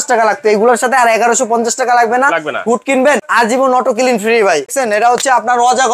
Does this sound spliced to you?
yes; 2 cuts; at 3.3 s, 4.7 s

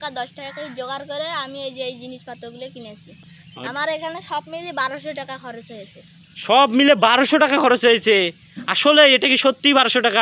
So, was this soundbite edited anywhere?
no; 0 cuts

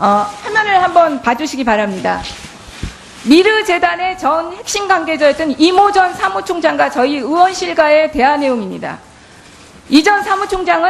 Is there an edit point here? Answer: yes; 1 cut; at 1.0 s

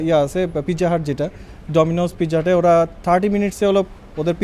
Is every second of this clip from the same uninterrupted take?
yes; 0 cuts

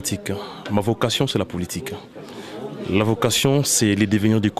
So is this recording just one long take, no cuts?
yes; 0 cuts

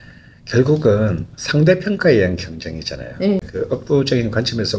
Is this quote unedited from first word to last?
no; 1 cut; at 3.5 s

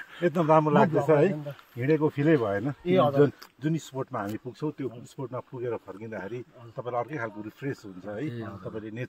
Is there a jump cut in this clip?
no; 0 cuts

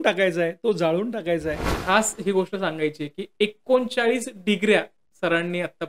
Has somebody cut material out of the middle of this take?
yes; 1 cut; at 1.7 s

